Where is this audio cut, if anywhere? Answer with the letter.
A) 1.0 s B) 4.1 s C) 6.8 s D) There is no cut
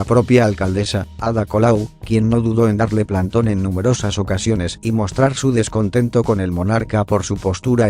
A